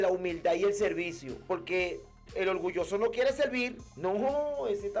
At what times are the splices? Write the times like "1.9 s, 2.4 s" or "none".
1.3 s, 3.8 s